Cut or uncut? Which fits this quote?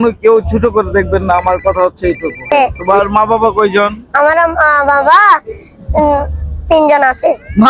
cut